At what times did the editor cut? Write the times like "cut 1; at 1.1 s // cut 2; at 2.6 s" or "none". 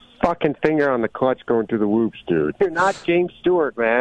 cut 1; at 2.5 s